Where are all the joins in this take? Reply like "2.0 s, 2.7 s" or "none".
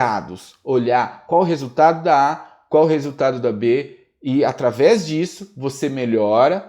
none